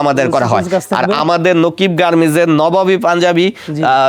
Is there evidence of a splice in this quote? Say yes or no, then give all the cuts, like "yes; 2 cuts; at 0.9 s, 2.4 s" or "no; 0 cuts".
no; 0 cuts